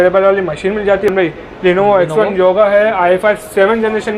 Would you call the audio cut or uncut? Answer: cut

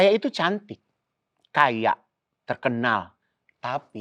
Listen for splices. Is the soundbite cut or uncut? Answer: uncut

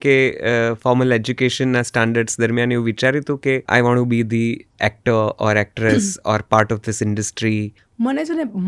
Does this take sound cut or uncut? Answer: cut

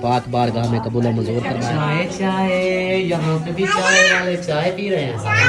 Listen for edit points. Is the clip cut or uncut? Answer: cut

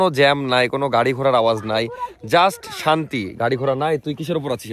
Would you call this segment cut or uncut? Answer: uncut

